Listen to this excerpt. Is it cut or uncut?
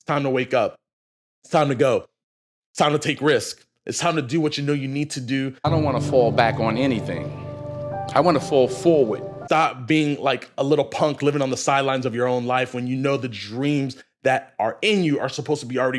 cut